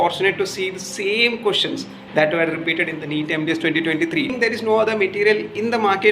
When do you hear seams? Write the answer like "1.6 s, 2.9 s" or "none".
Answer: 4.3 s